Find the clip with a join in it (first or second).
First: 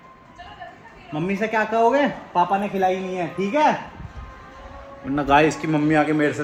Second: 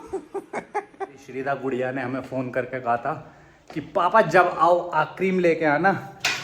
second